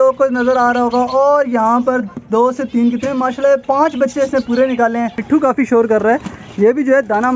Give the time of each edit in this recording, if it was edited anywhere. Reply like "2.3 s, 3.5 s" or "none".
5.2 s